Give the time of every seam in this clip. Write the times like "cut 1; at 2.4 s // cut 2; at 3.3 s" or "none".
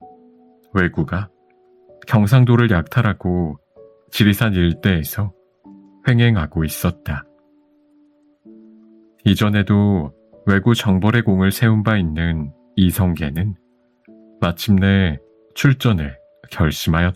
none